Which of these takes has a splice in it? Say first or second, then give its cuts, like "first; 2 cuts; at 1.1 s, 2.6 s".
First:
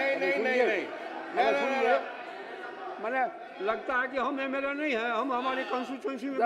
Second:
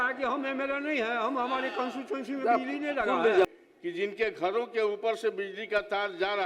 second; 1 cut; at 3.5 s